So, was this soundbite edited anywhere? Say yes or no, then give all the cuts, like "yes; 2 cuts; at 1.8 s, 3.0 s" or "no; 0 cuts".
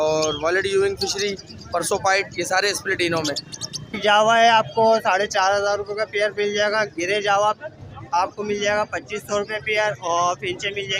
yes; 1 cut; at 4.0 s